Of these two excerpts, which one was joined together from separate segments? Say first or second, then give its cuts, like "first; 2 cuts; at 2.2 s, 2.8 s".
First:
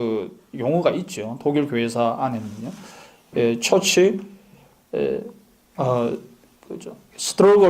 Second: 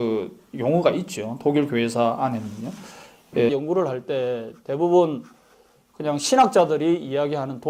first; 1 cut; at 3.5 s